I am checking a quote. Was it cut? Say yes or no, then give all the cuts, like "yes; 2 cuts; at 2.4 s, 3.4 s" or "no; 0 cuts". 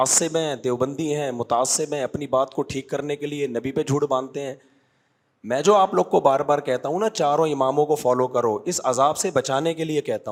no; 0 cuts